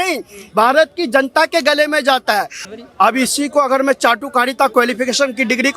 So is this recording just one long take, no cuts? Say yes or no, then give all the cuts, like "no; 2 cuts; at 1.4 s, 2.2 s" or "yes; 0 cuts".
no; 1 cut; at 2.6 s